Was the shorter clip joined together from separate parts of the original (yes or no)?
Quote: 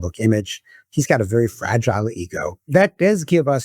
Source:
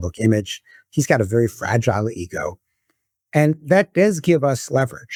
yes